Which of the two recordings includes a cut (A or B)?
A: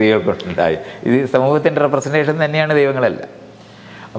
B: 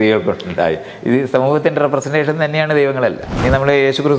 B